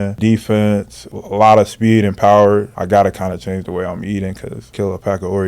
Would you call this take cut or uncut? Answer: cut